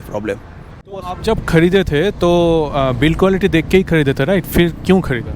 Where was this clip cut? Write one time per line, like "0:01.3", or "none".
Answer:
0:01.0